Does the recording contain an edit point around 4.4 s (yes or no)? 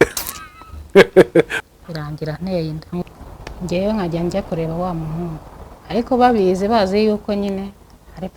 no